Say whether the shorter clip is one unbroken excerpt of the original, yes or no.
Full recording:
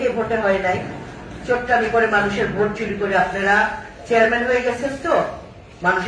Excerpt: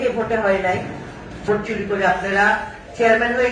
no